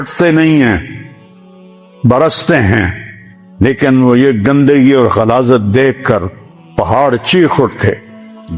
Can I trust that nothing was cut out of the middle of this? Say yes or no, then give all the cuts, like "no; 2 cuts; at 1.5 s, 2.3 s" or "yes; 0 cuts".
yes; 0 cuts